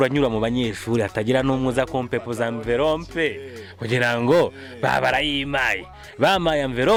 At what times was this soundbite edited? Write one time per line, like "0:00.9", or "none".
none